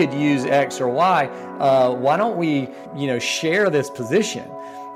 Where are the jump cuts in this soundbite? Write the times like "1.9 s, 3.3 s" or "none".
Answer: 2.8 s